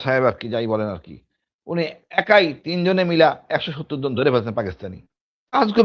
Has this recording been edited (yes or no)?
no